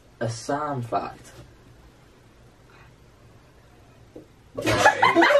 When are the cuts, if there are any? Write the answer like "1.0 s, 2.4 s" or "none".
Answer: 2.8 s